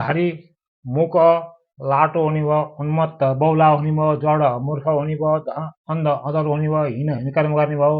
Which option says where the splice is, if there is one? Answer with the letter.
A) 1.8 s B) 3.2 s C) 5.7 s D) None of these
D